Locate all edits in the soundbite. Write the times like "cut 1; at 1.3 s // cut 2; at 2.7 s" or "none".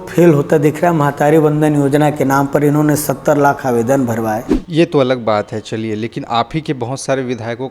cut 1; at 4.6 s